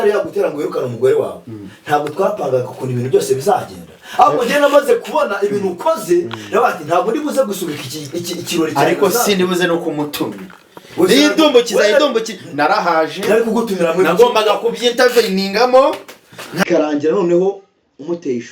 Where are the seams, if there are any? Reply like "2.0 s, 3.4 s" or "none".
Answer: 16.6 s